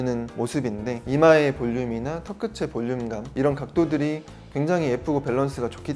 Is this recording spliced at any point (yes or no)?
yes